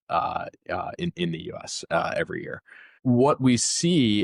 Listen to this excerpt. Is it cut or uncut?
uncut